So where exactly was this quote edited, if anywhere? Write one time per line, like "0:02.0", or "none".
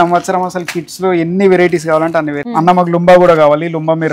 0:02.4